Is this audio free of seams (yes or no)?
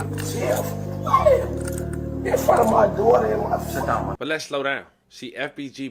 no